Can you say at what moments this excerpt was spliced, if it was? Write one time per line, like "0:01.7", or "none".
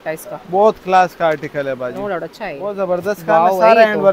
0:02.7

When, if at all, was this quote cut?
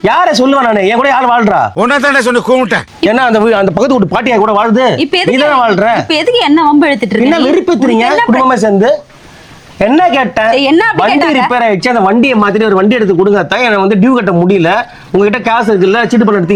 none

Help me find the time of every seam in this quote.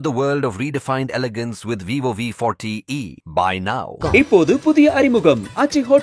none

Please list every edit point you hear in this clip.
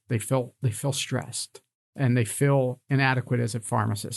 none

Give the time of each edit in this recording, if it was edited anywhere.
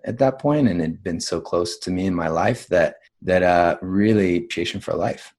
0:03.1
0:04.5

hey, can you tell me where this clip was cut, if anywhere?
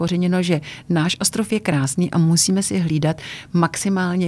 none

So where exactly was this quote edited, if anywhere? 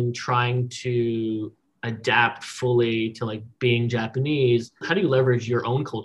0:04.8

